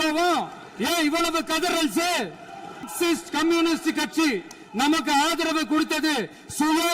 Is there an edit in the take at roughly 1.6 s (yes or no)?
no